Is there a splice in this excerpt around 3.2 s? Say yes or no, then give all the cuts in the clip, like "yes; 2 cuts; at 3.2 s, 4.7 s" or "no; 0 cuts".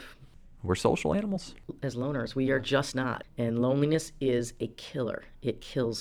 yes; 1 cut; at 3.2 s